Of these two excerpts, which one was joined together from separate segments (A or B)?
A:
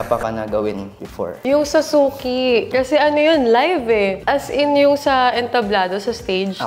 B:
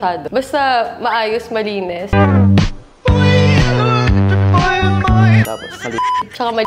A